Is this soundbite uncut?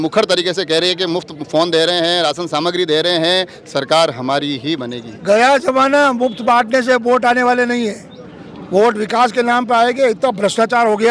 yes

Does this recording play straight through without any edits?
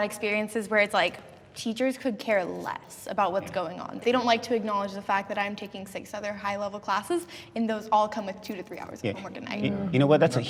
yes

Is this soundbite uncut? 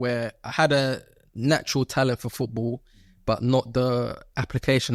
yes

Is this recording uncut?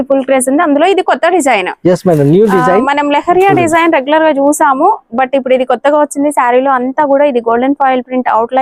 yes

